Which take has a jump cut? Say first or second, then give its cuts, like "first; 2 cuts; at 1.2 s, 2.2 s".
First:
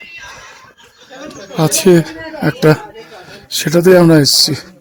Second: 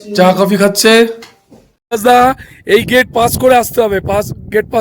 second; 1 cut; at 2.0 s